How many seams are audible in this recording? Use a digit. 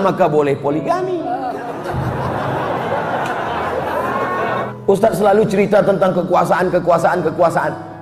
1